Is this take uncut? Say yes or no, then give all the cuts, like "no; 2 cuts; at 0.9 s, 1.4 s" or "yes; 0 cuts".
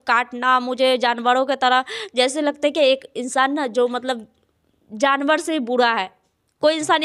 yes; 0 cuts